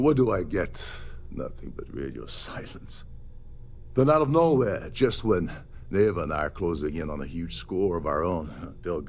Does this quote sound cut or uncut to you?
uncut